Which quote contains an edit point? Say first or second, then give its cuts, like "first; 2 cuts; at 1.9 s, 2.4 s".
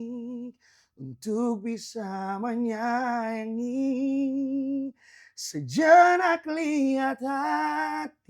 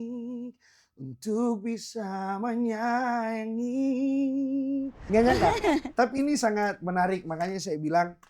second; 1 cut; at 5.0 s